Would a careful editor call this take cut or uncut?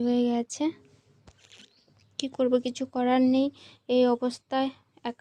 uncut